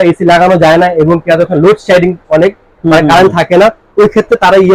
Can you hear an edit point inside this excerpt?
no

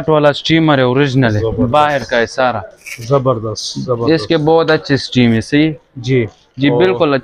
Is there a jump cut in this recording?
no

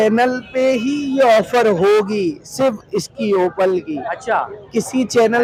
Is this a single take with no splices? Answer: yes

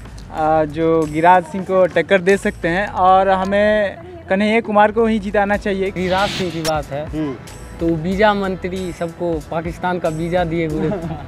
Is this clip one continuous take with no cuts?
no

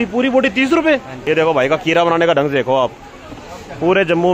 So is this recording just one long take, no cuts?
no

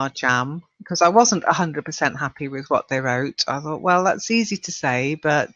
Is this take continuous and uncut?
no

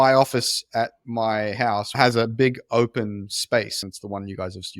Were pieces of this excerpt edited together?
yes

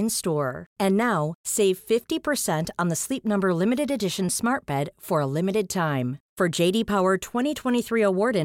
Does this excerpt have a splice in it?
no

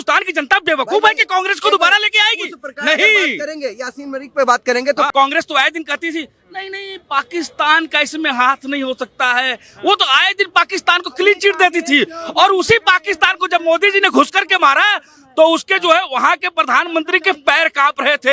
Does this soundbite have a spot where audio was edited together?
yes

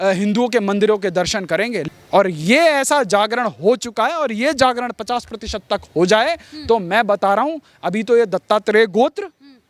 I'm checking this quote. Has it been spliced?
yes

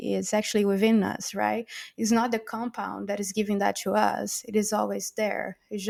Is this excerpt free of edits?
yes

